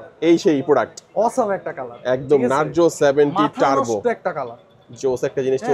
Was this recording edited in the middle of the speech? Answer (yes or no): no